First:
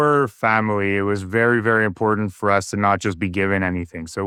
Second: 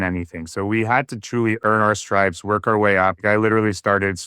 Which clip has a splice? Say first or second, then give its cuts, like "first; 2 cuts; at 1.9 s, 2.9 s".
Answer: second; 2 cuts; at 1.6 s, 3.2 s